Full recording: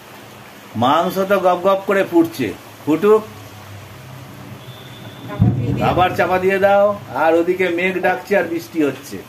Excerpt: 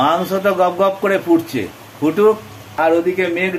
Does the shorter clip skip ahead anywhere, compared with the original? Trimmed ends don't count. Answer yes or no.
yes